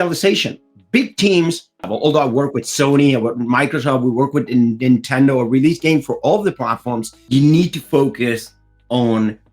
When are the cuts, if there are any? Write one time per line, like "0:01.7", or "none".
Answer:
0:01.9
0:07.1